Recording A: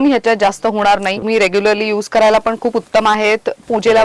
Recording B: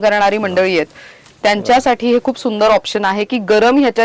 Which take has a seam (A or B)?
A